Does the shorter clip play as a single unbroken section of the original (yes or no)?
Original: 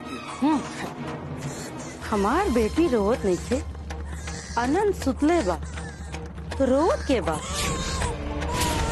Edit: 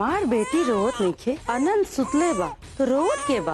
no